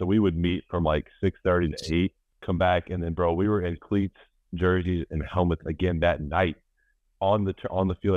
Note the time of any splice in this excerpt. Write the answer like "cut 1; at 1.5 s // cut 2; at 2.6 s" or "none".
cut 1; at 2.3 s